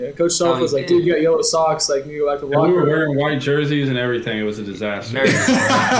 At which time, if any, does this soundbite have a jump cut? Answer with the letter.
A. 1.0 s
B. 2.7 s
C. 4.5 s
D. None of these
D